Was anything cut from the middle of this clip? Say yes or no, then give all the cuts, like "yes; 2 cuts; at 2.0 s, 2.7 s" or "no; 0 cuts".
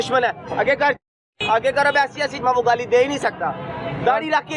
yes; 1 cut; at 2.4 s